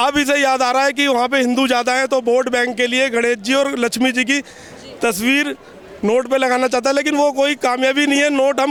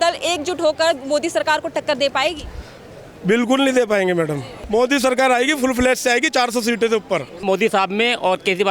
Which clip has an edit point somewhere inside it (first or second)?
second